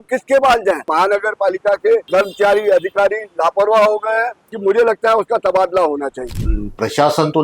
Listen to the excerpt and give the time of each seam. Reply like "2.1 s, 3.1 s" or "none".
0.9 s, 2.1 s, 4.4 s, 6.2 s